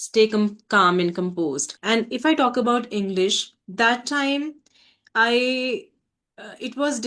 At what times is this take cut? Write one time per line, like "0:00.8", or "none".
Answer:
0:01.7